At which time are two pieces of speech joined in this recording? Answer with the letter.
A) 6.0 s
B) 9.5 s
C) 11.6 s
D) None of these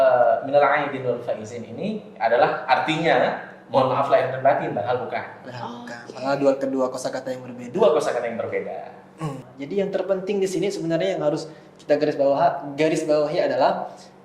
B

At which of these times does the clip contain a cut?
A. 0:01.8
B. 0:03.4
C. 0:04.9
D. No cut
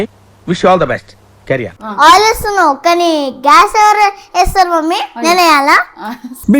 A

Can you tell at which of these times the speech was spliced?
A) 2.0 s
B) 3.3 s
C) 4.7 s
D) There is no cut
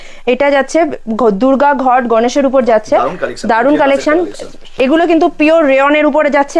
C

